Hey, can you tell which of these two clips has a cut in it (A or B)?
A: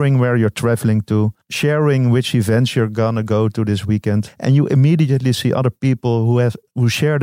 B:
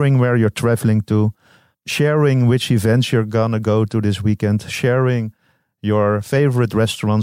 A